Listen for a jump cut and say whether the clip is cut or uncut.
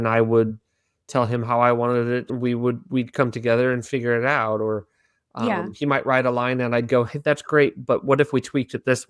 cut